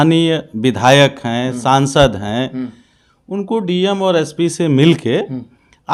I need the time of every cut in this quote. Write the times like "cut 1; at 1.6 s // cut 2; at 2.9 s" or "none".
none